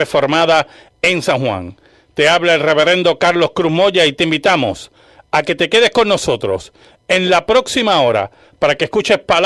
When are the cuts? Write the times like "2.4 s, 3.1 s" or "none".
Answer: none